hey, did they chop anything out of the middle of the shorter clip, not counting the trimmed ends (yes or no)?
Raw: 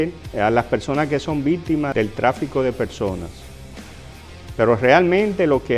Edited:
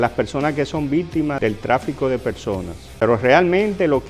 yes